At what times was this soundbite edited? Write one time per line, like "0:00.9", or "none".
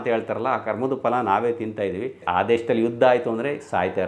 0:02.2